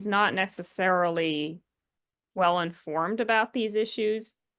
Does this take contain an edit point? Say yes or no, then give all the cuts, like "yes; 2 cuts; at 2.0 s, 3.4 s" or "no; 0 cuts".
no; 0 cuts